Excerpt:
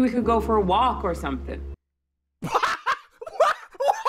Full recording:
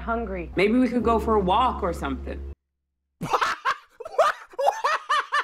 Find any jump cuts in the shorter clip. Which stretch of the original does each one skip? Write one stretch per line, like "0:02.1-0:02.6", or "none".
none